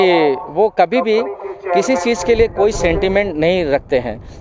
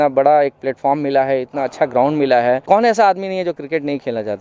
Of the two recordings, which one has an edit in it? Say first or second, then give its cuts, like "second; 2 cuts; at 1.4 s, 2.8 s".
second; 1 cut; at 2.6 s